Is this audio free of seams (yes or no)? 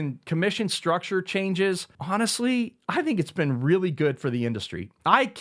no